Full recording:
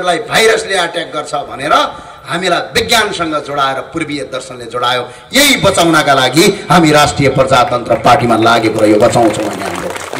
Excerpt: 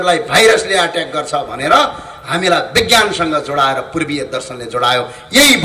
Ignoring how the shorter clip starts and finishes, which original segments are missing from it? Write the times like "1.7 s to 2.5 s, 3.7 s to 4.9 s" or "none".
none